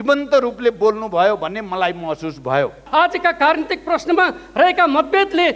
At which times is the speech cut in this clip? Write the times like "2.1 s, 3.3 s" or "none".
2.8 s